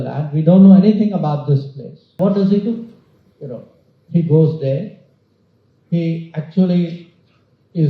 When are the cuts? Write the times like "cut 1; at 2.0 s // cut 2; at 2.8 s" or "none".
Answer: cut 1; at 2.2 s